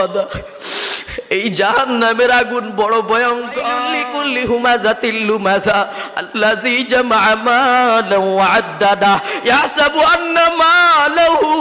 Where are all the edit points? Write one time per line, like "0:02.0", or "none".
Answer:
0:03.9